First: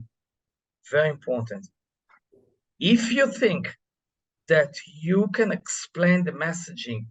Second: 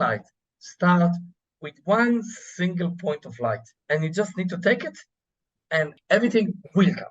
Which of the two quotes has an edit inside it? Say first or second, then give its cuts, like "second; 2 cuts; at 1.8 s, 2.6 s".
second; 2 cuts; at 3.7 s, 5.9 s